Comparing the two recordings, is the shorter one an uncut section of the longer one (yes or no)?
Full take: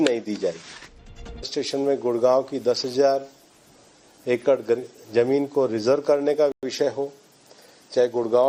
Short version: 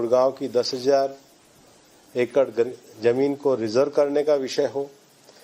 no